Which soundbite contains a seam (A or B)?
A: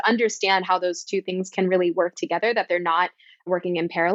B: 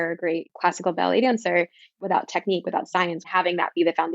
B